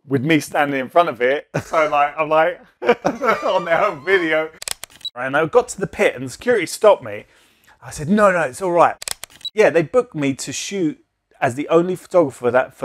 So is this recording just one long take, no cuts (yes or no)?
no